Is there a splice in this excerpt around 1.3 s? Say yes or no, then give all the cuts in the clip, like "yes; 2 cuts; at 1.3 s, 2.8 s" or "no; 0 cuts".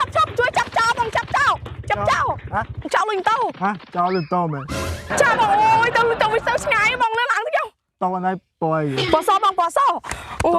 no; 1 cut; at 2.9 s